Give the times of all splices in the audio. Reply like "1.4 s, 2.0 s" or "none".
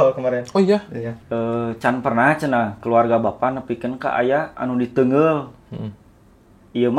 1.2 s